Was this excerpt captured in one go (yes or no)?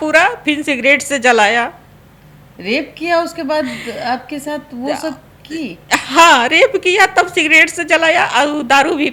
yes